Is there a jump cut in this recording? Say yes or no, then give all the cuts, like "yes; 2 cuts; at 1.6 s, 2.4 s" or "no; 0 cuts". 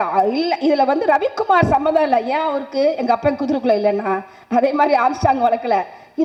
no; 0 cuts